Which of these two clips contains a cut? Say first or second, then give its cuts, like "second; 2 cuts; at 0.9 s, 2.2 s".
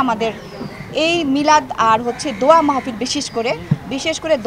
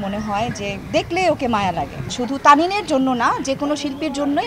second; 1 cut; at 2.1 s